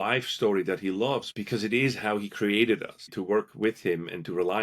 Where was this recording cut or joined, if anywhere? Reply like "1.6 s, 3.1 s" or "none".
1.3 s, 3.1 s